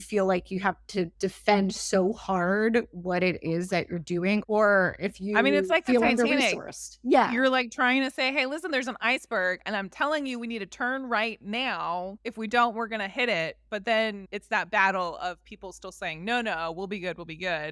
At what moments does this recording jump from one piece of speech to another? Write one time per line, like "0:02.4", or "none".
0:01.1
0:04.4
0:12.2
0:14.3